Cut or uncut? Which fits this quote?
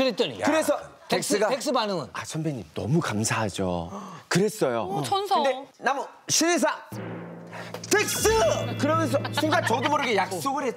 uncut